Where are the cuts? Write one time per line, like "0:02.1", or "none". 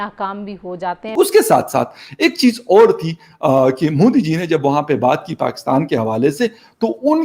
0:01.0